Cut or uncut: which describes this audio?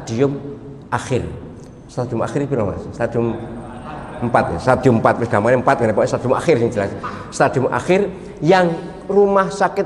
uncut